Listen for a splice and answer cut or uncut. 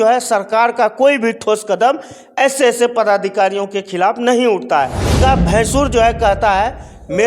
cut